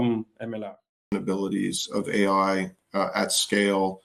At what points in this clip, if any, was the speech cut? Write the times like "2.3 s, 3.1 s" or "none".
1.1 s